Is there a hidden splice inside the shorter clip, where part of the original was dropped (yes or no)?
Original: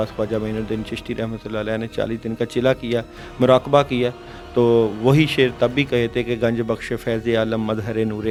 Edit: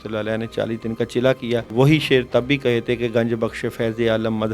yes